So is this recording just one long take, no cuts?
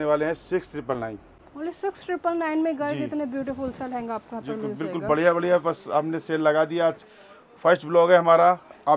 yes; 0 cuts

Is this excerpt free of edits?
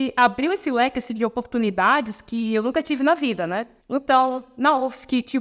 yes; 0 cuts

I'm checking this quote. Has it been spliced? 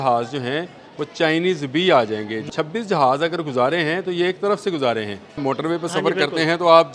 yes; 2 cuts; at 2.5 s, 5.4 s

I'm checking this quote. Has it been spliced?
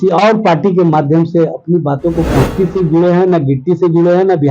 yes; 1 cut; at 2.5 s

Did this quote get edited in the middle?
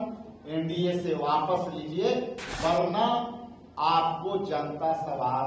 yes; 1 cut; at 2.4 s

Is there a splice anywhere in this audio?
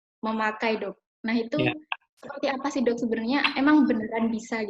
no; 0 cuts

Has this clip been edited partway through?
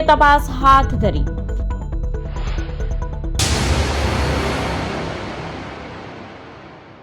yes; 1 cut; at 3.2 s

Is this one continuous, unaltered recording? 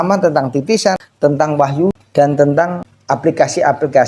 no; 3 cuts; at 1.1 s, 2.0 s, 2.9 s

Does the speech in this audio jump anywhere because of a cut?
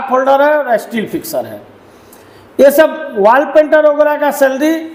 no; 0 cuts

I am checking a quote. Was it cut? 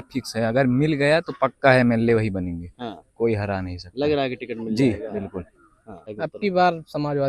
yes; 1 cut; at 6.1 s

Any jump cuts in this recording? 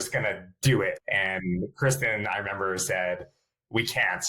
yes; 1 cut; at 1.0 s

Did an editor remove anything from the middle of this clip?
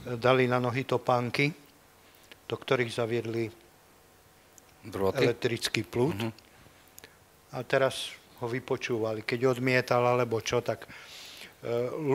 no; 0 cuts

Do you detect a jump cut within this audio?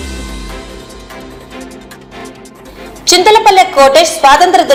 no; 0 cuts

